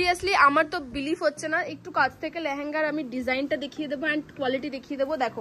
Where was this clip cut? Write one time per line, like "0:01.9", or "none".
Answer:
none